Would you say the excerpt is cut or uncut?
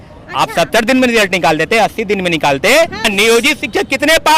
cut